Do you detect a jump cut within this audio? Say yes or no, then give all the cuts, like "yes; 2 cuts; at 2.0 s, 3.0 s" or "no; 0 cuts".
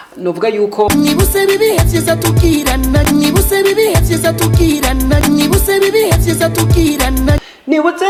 no; 0 cuts